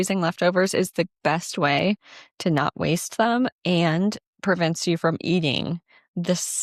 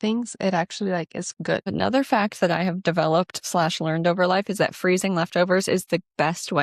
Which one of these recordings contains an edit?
second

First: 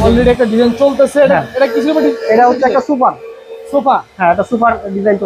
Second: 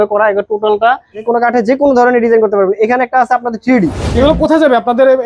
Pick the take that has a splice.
second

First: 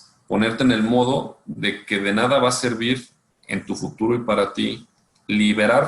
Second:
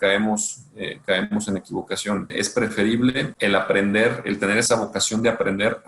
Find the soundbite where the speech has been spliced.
second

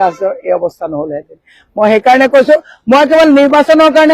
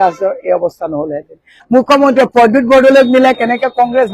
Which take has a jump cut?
second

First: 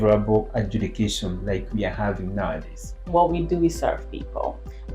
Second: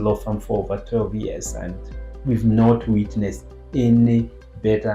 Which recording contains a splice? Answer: first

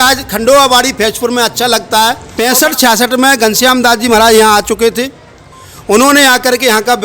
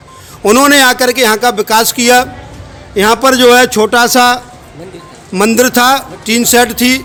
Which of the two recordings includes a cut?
first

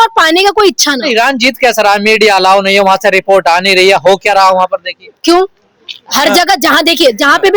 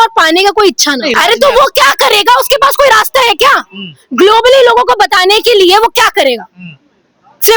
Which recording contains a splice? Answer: second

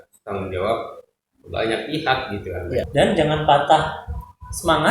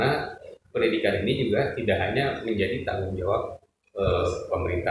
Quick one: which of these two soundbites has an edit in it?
first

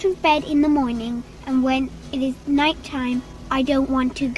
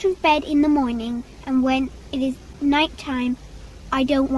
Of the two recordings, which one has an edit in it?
first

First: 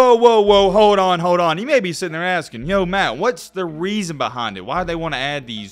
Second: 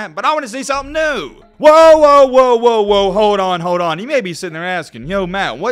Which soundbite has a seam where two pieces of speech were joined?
second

